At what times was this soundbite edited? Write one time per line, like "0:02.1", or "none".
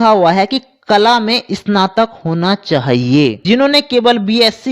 0:03.4